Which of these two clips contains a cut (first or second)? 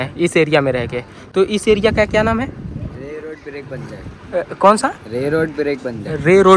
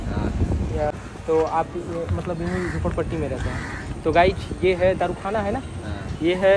second